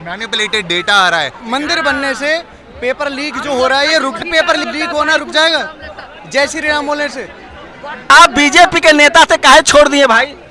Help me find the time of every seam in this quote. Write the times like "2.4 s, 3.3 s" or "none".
1.4 s, 4.3 s, 8.1 s